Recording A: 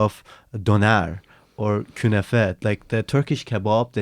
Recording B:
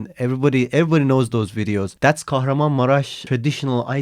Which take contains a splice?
B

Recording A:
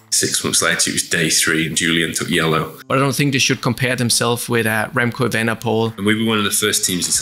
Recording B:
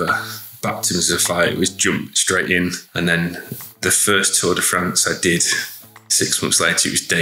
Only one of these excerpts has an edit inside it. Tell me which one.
A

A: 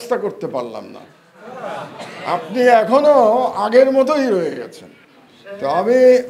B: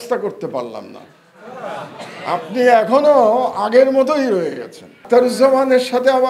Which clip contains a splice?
B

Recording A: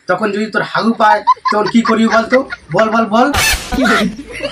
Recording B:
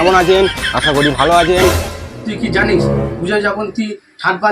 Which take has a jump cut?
B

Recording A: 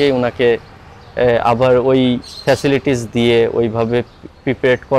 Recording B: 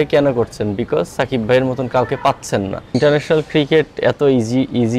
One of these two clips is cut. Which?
B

